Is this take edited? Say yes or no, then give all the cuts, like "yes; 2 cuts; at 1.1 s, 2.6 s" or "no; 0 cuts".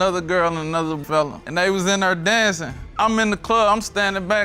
yes; 2 cuts; at 1.2 s, 2.9 s